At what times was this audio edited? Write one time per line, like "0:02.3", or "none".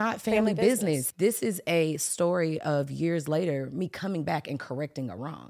0:01.1